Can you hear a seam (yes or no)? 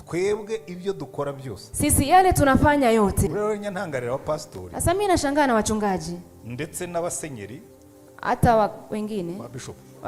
yes